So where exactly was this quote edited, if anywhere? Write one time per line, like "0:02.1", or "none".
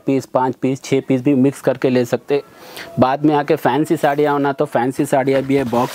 none